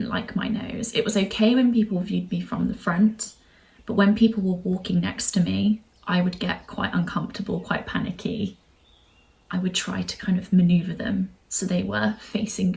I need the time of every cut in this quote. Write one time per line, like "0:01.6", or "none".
none